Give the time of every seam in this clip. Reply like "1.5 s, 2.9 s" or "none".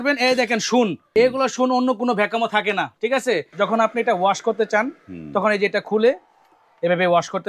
1.0 s, 3.5 s

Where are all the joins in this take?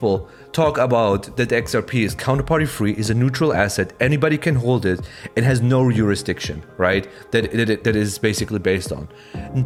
none

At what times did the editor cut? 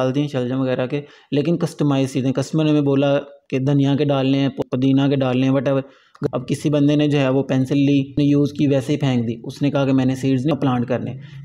4.6 s, 6.2 s, 8.1 s, 10.5 s

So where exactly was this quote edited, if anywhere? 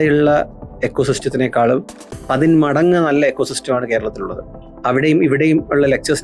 none

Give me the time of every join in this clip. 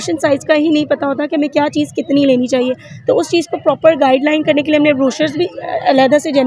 none

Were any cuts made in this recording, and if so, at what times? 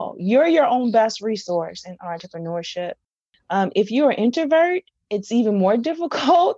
none

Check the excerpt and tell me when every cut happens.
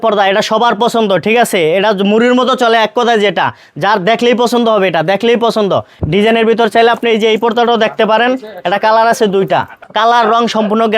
5.9 s, 9.8 s

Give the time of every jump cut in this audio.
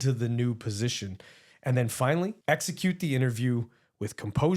2.4 s

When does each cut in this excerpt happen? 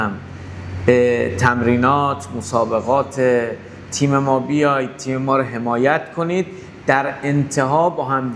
none

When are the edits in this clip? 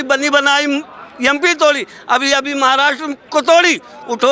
none

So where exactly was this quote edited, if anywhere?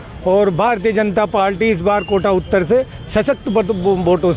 none

